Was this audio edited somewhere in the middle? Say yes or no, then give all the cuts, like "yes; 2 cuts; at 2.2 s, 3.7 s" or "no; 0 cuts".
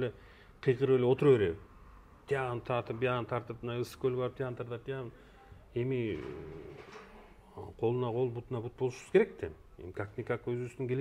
no; 0 cuts